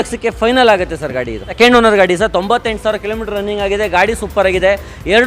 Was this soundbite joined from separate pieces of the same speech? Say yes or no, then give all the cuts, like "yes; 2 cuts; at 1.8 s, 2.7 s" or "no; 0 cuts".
yes; 1 cut; at 1.5 s